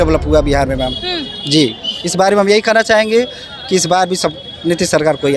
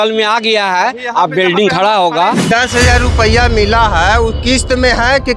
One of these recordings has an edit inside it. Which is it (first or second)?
second